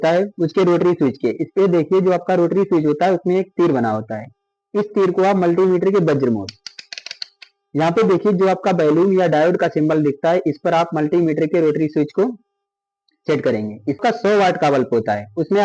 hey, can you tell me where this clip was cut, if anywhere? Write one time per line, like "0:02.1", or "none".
0:14.0